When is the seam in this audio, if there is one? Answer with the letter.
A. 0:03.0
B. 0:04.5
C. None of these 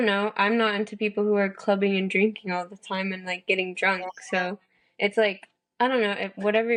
C